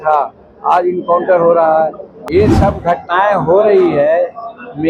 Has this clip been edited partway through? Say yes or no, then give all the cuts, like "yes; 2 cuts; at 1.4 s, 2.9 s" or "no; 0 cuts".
yes; 1 cut; at 2.1 s